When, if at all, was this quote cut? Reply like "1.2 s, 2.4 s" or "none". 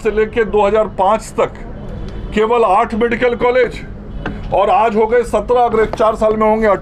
none